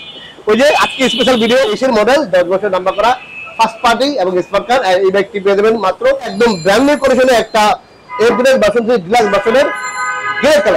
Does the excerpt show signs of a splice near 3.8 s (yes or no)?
no